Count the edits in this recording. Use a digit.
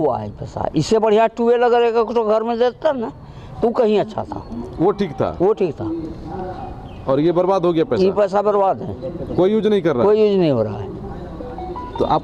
0